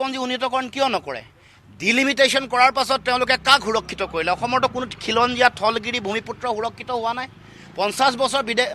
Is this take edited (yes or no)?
no